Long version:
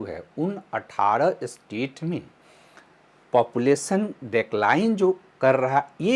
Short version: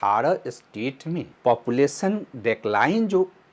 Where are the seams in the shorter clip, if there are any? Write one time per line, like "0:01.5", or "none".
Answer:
0:01.3